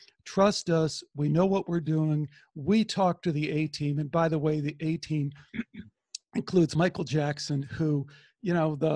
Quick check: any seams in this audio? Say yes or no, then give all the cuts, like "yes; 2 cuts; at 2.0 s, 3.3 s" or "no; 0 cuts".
yes; 1 cut; at 6.7 s